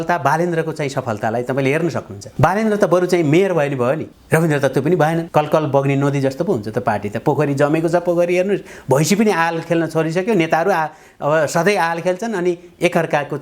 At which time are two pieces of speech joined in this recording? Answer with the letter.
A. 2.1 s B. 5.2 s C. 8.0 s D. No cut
B